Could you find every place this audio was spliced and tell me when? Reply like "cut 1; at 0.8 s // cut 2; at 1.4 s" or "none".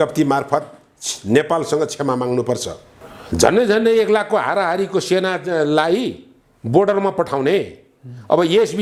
cut 1; at 2.9 s